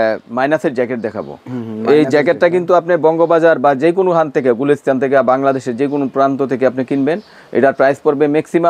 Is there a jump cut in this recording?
no; 0 cuts

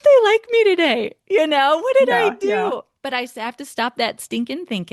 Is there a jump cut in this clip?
no; 0 cuts

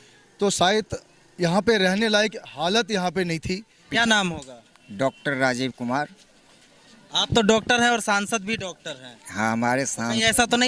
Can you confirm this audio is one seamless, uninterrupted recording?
no; 1 cut; at 3.7 s

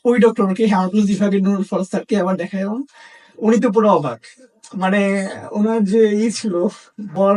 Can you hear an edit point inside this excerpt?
no; 0 cuts

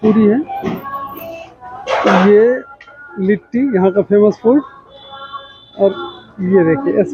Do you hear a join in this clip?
no; 0 cuts

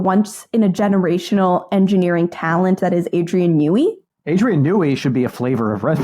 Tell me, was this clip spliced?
yes; 1 cut; at 4.1 s

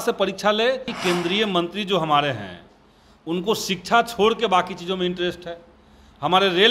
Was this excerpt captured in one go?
no; 1 cut; at 0.9 s

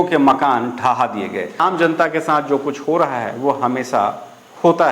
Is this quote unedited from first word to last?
no; 1 cut; at 1.6 s

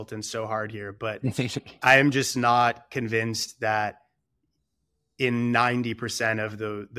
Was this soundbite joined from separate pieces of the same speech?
no; 0 cuts

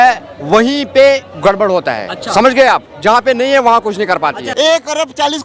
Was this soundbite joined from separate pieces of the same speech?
yes; 1 cut; at 4.5 s

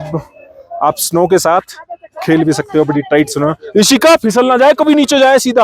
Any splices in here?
no; 0 cuts

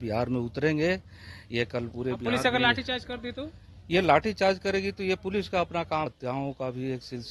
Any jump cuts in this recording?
yes; 1 cut; at 6.1 s

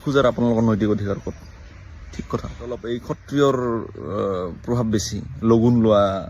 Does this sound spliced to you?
yes; 1 cut; at 2.9 s

